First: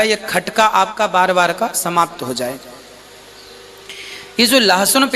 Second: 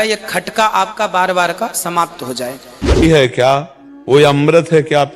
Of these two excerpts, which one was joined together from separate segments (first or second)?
second